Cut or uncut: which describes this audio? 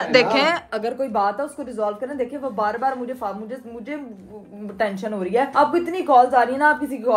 uncut